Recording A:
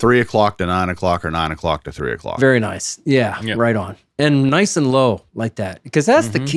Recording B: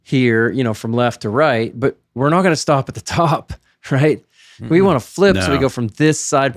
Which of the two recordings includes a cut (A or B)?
B